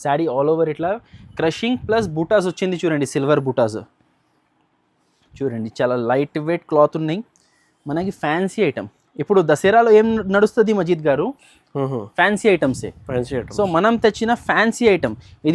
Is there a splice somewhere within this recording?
no; 0 cuts

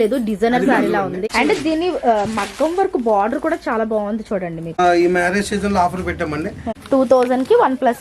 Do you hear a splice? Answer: yes; 3 cuts; at 1.2 s, 4.8 s, 6.7 s

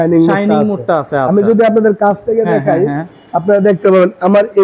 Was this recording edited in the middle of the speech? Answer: no; 0 cuts

